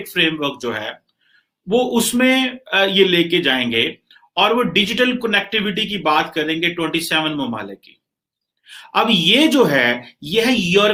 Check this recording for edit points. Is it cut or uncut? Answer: uncut